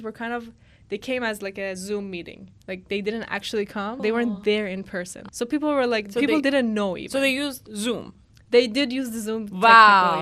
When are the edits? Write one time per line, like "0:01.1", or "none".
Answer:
0:04.0
0:05.2